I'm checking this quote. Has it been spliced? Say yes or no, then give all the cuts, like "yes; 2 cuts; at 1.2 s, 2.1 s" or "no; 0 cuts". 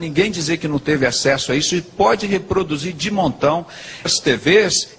no; 0 cuts